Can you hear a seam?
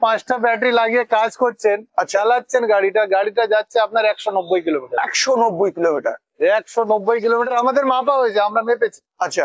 no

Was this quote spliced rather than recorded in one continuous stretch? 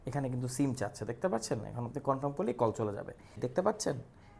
yes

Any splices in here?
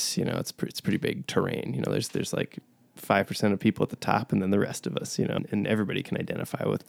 yes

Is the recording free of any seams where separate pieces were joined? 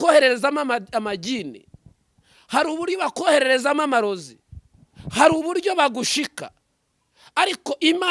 yes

